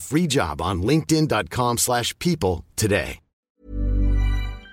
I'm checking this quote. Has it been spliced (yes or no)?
yes